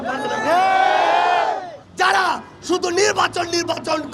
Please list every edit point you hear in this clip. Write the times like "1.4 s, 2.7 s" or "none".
1.8 s